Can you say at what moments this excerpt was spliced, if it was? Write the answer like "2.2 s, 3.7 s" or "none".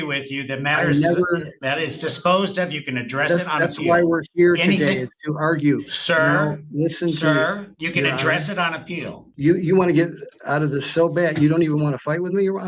9.2 s

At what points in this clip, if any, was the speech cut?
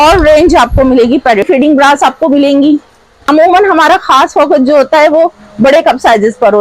1.5 s, 3.2 s

